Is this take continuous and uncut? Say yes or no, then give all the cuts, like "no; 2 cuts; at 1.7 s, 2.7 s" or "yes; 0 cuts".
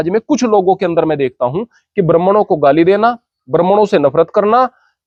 yes; 0 cuts